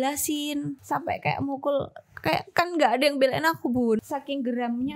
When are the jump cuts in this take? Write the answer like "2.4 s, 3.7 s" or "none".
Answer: 0.8 s, 4.0 s